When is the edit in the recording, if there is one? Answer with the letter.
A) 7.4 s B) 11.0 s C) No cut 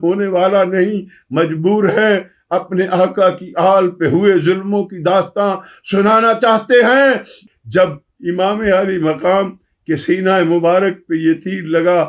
A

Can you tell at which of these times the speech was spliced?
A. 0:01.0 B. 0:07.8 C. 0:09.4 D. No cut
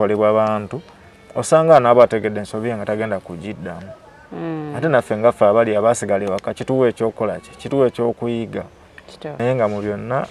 C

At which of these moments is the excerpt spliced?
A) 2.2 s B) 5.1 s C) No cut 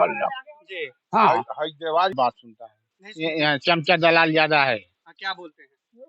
A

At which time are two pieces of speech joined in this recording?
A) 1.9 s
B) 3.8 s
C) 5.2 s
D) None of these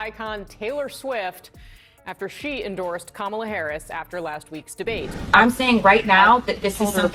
C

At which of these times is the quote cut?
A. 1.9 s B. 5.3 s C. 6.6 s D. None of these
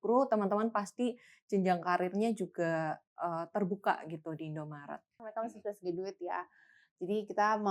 B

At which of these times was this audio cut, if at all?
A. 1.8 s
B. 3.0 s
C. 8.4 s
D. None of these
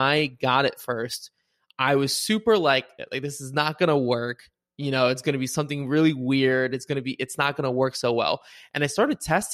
B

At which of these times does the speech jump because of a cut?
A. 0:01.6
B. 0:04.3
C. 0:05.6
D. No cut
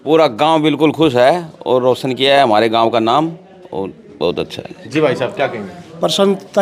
D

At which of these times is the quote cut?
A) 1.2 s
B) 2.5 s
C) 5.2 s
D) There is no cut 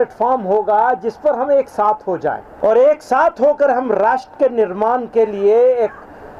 B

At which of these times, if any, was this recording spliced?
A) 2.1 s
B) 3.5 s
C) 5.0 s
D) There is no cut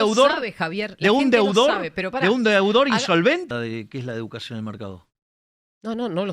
B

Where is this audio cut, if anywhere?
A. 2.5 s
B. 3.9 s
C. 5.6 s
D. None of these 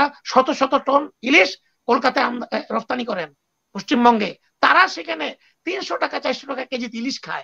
D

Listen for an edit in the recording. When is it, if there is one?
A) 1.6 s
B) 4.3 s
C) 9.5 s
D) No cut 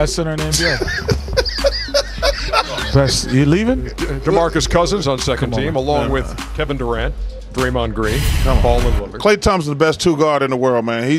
A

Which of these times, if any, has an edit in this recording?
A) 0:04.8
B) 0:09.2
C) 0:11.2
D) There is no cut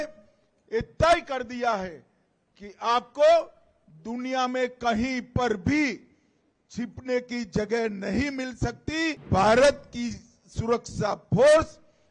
B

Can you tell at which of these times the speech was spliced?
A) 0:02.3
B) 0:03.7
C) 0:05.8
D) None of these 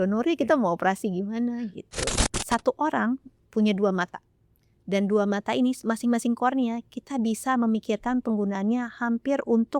A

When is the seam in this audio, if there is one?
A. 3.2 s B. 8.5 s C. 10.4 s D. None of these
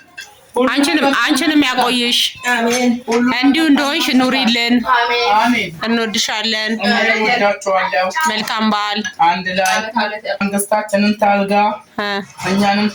C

